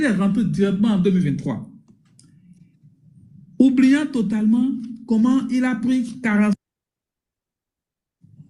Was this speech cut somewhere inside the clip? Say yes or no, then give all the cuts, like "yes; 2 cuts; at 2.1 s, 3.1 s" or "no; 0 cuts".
no; 0 cuts